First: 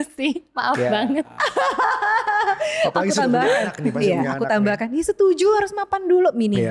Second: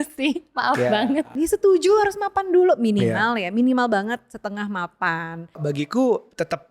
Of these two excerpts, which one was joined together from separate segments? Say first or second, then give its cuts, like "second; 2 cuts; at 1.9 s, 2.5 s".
second; 2 cuts; at 1.3 s, 5.6 s